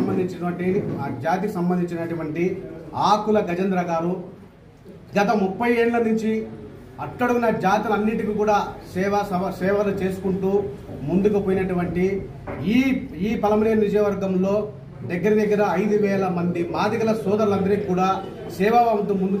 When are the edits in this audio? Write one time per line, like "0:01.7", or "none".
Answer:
none